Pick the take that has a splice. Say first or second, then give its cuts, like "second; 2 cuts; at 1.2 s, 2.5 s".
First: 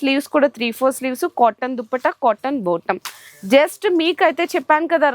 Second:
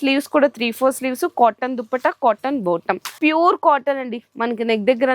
second; 1 cut; at 3.2 s